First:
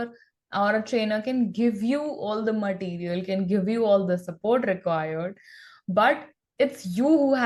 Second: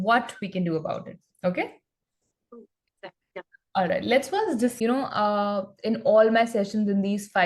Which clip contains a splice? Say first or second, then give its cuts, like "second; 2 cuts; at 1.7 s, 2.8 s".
second; 1 cut; at 4.8 s